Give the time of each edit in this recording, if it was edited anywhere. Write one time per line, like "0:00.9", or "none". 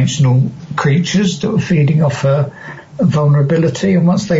none